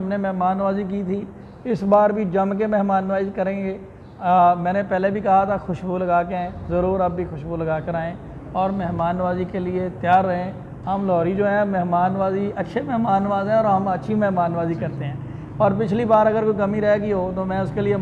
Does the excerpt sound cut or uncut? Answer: uncut